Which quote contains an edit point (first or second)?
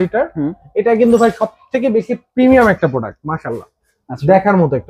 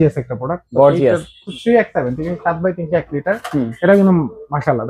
second